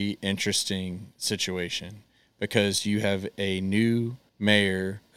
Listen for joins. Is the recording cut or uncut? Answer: cut